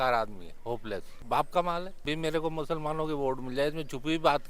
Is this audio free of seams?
no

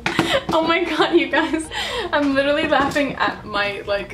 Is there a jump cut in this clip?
no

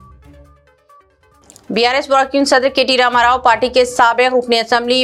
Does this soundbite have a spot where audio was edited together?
no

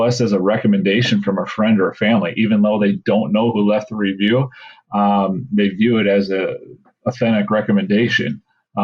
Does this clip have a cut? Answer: no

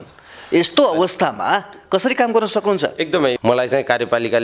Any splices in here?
yes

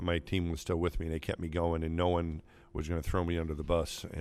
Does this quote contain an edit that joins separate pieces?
no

